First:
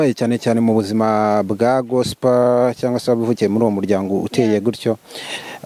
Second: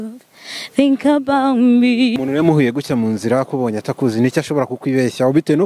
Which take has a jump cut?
second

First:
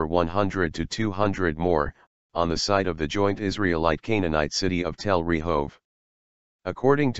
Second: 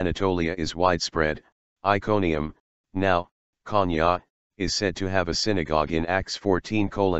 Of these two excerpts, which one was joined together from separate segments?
first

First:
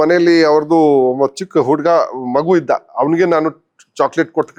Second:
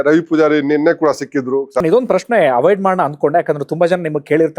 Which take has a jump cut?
second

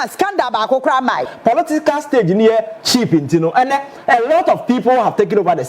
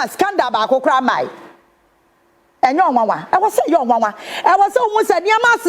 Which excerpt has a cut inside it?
first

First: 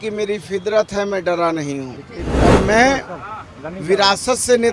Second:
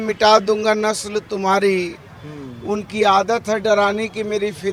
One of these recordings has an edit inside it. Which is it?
first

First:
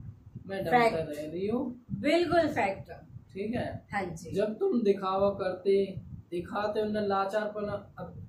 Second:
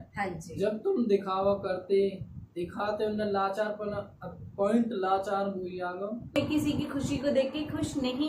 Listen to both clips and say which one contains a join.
second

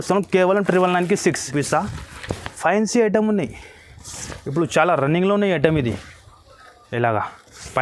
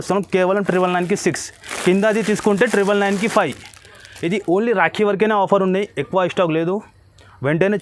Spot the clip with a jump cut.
first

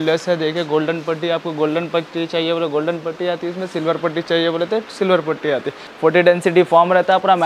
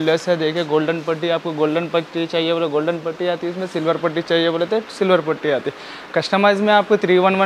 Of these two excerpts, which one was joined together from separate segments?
first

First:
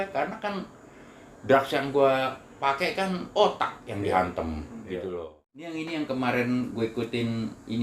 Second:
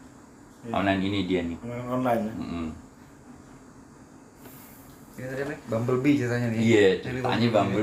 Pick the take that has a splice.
first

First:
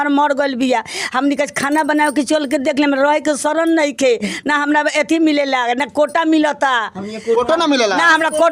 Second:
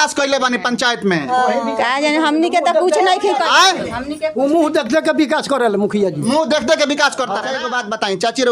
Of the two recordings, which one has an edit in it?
second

